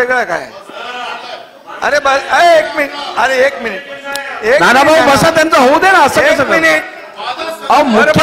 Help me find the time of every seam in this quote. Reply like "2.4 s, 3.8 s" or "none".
none